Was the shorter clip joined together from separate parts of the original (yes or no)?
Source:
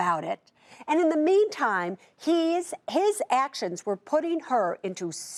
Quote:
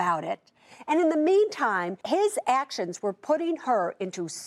yes